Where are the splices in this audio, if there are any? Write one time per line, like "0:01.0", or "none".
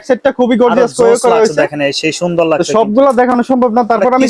none

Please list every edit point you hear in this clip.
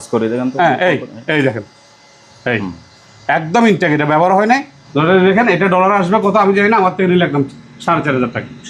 0:04.8

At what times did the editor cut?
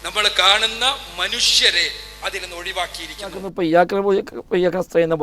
0:03.5

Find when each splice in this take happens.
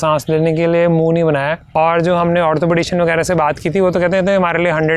0:01.6

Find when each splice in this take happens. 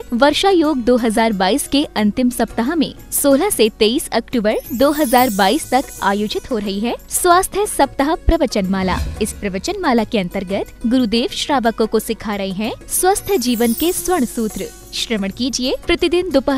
none

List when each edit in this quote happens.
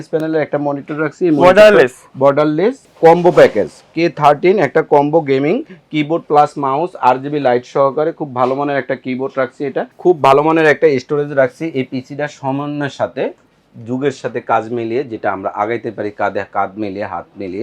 0:02.8
0:09.9

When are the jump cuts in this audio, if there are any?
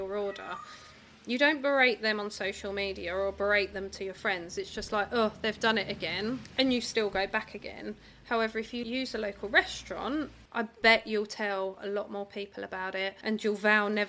0:06.5
0:08.8
0:10.4
0:13.2

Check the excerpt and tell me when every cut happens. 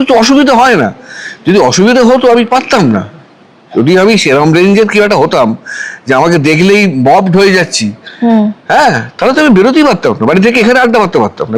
none

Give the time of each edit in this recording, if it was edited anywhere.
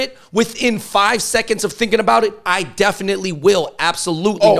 none

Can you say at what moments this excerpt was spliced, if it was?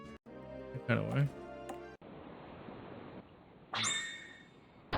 0:03.2

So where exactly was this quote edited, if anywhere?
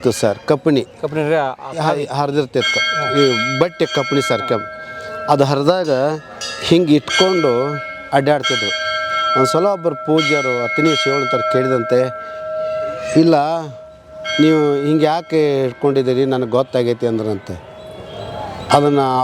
none

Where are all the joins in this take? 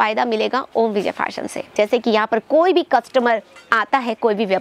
0:01.6

